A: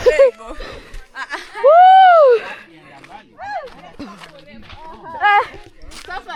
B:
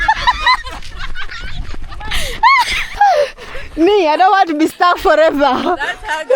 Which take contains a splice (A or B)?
B